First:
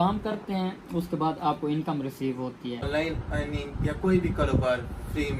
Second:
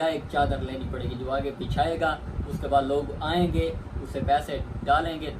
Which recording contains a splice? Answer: first; 1 cut; at 2.8 s

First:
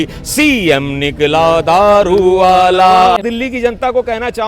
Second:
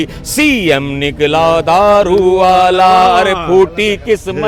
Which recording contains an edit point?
first; 1 cut; at 3.2 s

